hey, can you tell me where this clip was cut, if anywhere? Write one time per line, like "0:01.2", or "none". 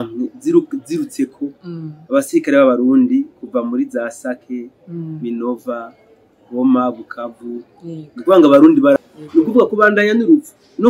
0:09.0